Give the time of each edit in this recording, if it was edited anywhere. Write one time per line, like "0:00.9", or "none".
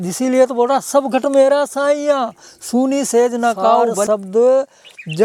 0:04.0